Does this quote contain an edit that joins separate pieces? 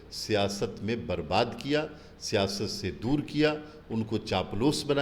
no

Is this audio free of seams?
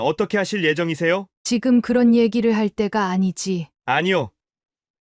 no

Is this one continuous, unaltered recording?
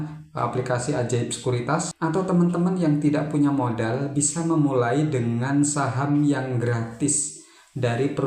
no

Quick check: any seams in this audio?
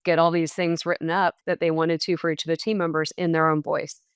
yes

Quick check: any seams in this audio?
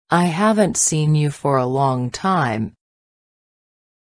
yes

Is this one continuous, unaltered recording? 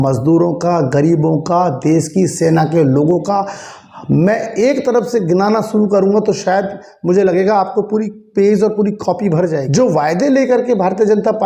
no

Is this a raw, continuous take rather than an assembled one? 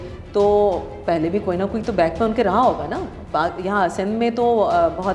yes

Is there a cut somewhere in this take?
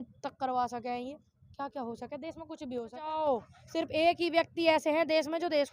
yes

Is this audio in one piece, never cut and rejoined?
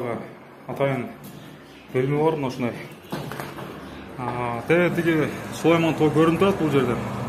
yes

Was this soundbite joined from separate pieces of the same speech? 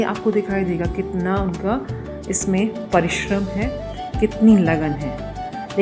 no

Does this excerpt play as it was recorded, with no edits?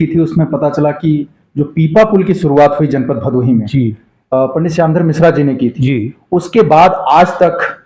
yes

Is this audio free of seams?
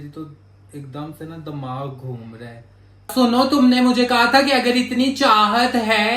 no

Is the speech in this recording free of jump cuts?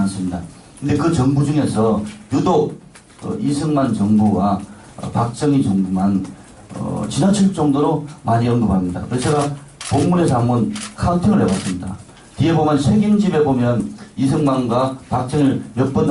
no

